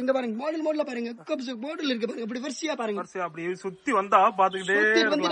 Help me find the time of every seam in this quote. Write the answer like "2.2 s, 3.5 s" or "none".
none

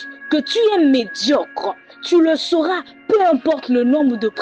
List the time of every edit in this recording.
none

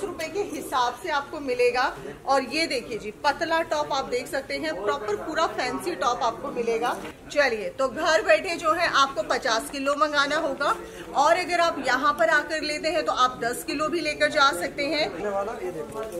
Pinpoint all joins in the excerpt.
7.1 s, 15.2 s

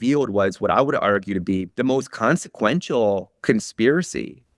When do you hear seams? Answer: 1.7 s

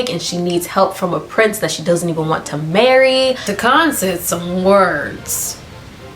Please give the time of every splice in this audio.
3.5 s

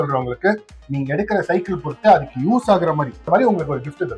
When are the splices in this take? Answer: 3.3 s

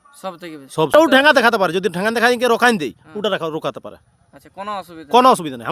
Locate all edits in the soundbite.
0.9 s

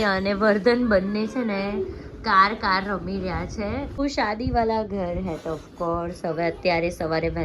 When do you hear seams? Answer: 3.9 s

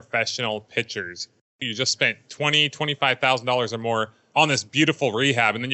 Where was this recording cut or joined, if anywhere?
1.4 s

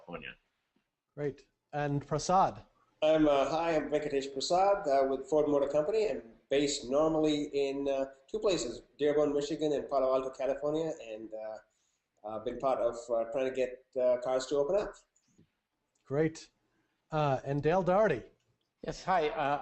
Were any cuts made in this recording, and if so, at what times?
10.7 s

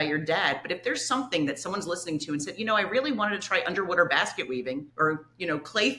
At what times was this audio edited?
none

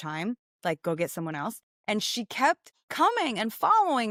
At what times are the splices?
none

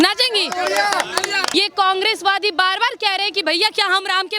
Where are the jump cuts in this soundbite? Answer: 1.4 s

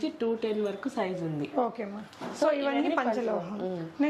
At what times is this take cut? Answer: none

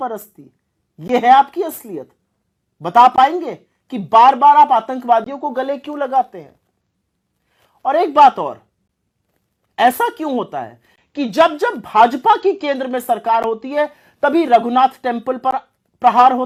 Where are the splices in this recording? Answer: none

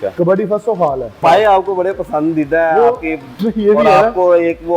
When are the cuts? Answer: 1.2 s

